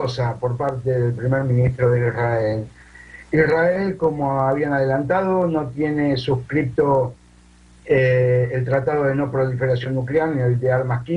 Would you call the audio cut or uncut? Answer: cut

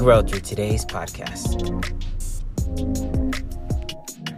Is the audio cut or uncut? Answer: cut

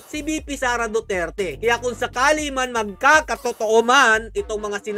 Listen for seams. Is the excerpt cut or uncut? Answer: uncut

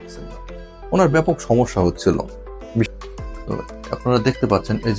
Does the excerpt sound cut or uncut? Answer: cut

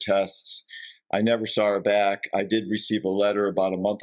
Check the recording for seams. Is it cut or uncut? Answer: uncut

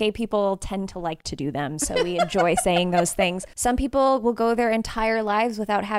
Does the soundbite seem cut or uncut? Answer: cut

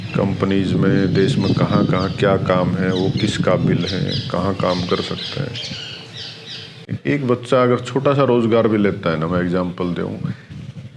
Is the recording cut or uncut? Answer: cut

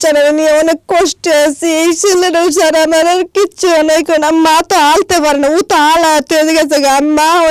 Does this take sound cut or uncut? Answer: uncut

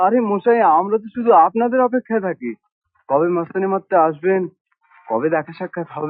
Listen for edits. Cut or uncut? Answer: uncut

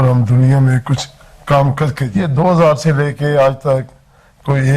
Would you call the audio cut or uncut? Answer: cut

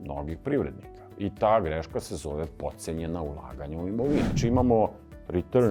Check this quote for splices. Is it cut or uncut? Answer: cut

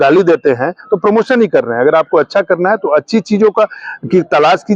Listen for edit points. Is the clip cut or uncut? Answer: uncut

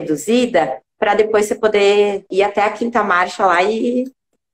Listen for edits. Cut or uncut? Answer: cut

